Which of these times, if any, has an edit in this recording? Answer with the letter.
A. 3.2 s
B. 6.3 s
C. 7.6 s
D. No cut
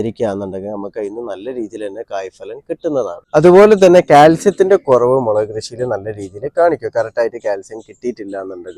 D